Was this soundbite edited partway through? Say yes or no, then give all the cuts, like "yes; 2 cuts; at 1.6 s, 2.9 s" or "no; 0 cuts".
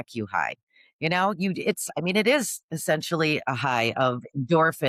no; 0 cuts